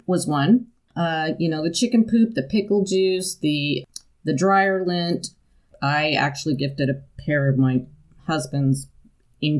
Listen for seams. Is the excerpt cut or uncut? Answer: cut